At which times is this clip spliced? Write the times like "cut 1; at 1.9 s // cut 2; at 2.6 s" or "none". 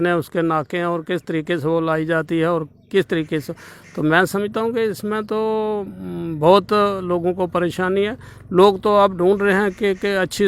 none